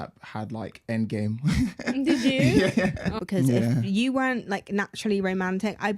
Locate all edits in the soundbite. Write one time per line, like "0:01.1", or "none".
0:03.1